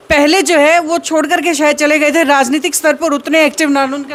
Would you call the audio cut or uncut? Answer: uncut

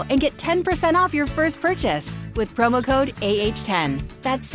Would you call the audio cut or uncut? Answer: uncut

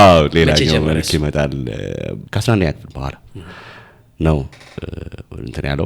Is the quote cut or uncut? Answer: cut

